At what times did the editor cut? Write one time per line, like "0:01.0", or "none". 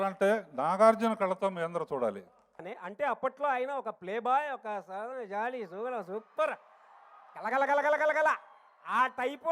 0:02.7